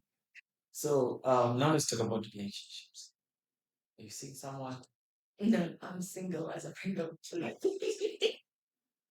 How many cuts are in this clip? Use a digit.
0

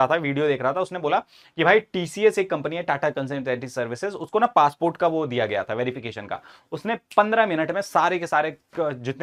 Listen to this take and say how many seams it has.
0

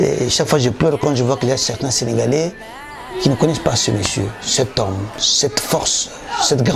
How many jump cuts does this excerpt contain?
0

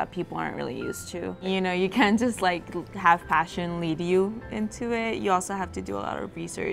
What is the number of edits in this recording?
1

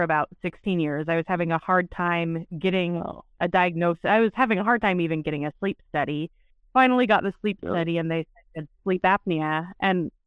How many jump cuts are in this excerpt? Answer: 0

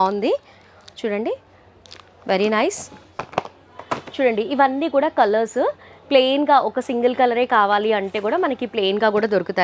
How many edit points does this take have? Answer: 0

